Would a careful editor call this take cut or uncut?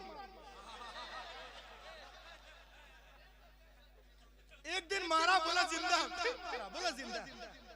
uncut